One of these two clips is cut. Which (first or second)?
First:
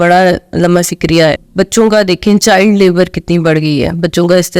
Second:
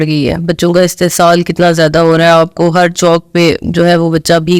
first